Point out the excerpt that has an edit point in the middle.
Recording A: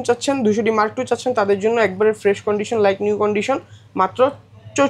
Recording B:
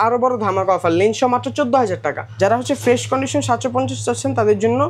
B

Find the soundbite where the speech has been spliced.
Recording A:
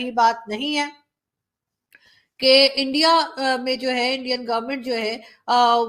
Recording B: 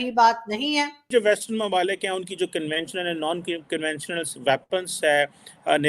B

